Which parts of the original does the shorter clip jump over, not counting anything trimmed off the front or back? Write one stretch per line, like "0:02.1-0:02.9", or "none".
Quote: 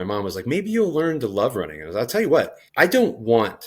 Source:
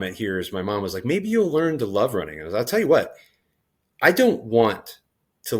0:03.2-0:03.9

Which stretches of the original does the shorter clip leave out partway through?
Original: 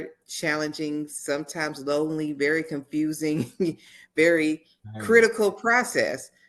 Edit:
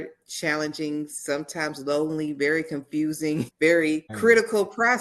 0:03.5-0:04.1
0:04.6-0:04.9

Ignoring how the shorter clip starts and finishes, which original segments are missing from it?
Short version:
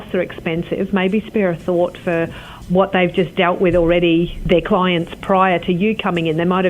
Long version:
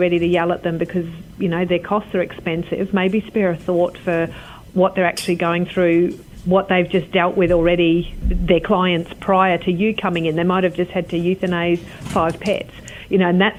0:04.5-0:06.3
0:08.1-0:08.4

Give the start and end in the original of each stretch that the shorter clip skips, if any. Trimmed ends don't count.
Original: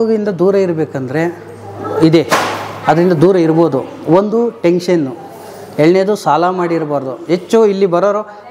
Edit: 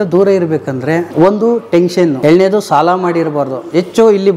0:01.3-0:04.0
0:05.1-0:05.7

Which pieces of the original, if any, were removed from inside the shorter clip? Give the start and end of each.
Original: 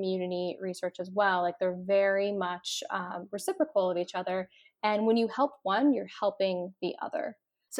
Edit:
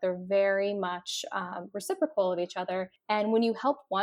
0:04.5-0:04.7

